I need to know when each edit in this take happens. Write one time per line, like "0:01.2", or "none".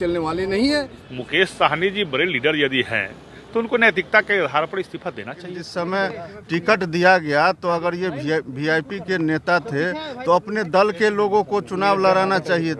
0:01.0
0:05.6